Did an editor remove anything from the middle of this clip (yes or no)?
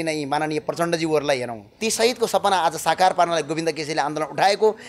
yes